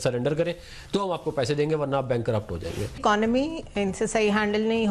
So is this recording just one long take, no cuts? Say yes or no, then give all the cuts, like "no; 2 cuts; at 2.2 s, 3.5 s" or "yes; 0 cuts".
no; 1 cut; at 3.0 s